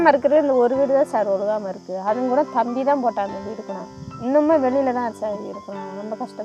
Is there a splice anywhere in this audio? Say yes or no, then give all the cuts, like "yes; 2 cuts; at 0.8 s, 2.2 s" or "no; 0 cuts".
no; 0 cuts